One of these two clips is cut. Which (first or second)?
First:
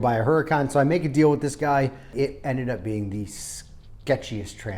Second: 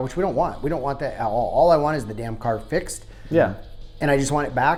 first